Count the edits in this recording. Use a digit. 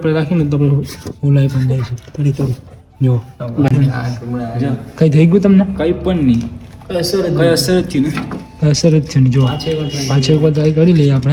0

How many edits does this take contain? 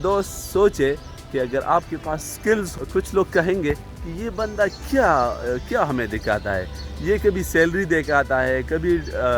1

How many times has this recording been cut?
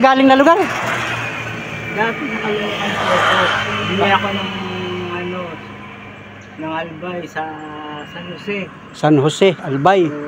0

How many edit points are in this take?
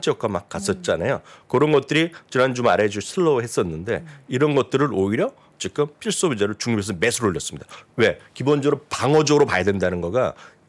0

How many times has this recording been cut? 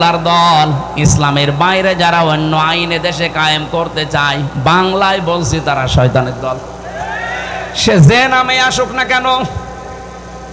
0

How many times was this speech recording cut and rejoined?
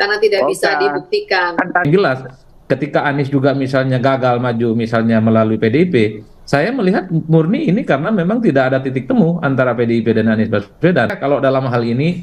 2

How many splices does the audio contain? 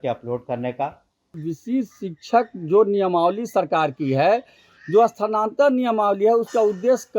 1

